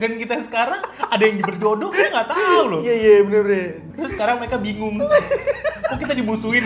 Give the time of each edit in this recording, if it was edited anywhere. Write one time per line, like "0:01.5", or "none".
0:03.8

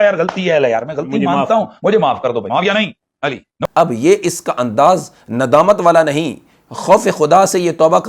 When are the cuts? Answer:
0:03.7

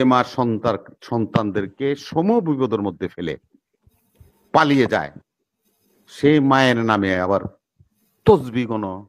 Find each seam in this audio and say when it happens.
none

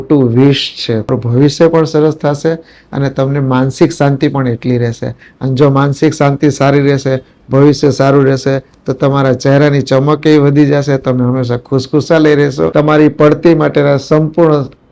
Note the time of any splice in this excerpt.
0:01.1
0:12.7

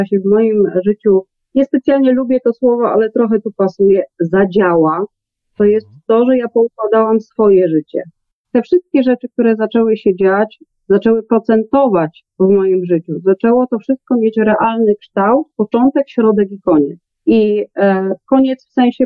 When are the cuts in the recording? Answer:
0:08.4
0:10.7
0:17.1

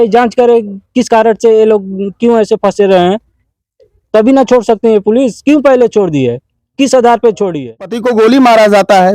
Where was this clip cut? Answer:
0:08.0

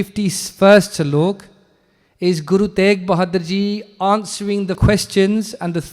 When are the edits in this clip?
0:04.8

